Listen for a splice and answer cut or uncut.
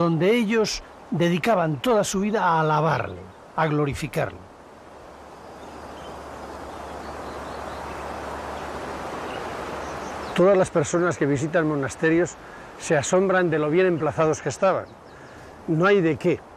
cut